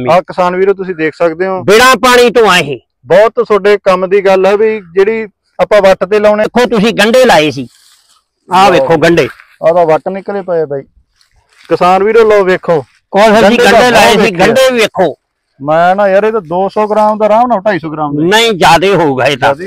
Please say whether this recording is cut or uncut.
cut